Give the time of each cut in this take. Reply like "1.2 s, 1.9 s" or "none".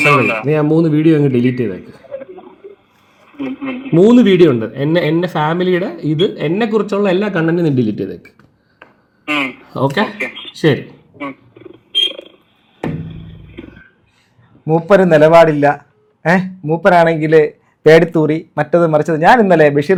none

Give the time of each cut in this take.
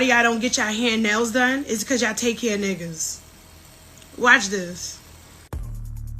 none

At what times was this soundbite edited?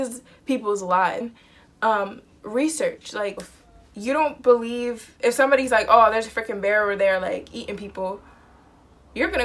1.2 s

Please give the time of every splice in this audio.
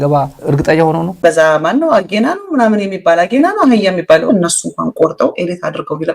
1.1 s, 4.3 s

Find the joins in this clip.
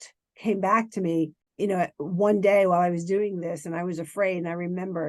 1.4 s

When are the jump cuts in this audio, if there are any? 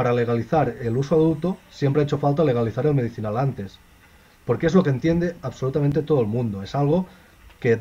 none

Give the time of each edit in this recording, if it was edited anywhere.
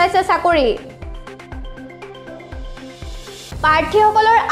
1.0 s, 3.6 s

